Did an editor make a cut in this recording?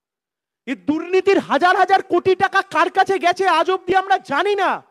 no; 0 cuts

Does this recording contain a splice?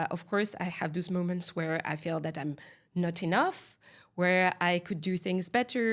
no; 0 cuts

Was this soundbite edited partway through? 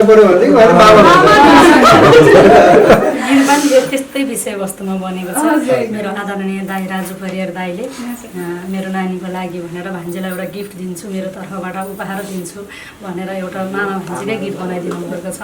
no; 0 cuts

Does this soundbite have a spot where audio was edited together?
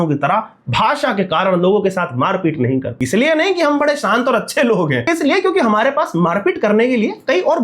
yes; 2 cuts; at 3.0 s, 5.1 s

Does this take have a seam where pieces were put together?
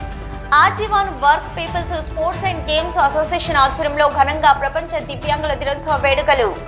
no; 0 cuts

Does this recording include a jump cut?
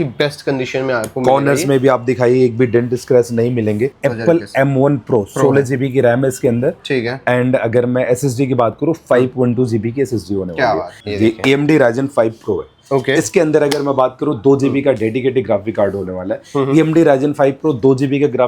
yes; 2 cuts; at 4.0 s, 11.0 s

